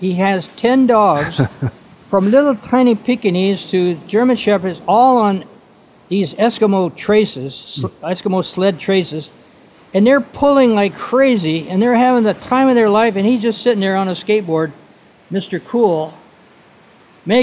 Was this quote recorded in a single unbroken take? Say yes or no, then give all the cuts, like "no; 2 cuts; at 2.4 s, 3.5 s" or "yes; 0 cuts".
yes; 0 cuts